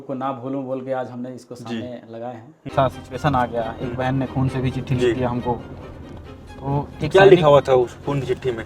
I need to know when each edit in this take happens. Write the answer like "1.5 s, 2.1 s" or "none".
2.7 s